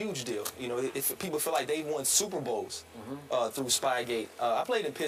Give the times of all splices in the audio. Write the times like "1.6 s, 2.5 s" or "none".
none

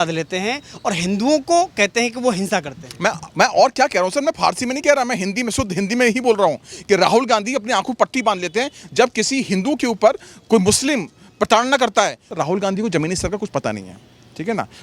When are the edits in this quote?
12.3 s

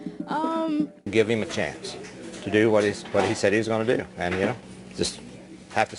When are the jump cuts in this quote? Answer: 1.1 s

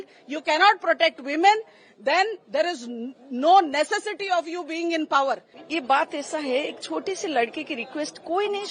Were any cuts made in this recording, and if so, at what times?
5.5 s

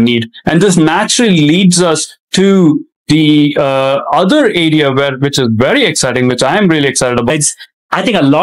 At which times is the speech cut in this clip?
7.3 s

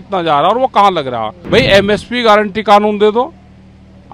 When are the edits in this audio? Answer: 1.3 s

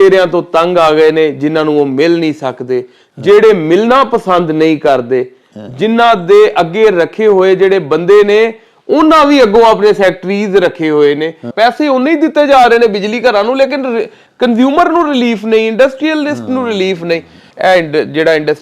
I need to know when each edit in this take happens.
11.4 s, 17.4 s

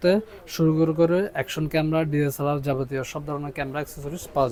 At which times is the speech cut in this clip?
none

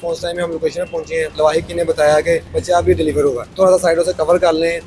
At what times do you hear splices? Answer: 1.3 s, 2.5 s, 3.5 s

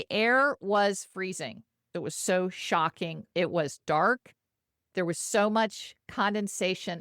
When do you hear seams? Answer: 1.8 s, 3.2 s

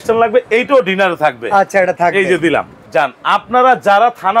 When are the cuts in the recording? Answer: 2.8 s

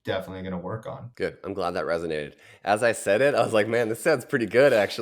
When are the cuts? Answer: 1.0 s

